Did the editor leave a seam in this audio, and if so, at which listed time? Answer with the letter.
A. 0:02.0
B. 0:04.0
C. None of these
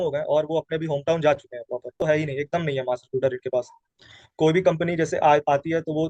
A